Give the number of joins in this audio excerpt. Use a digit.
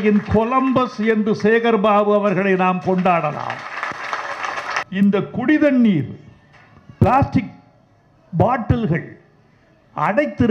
1